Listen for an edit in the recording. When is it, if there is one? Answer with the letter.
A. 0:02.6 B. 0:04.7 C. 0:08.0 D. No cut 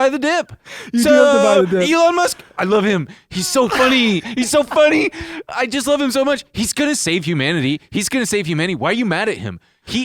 B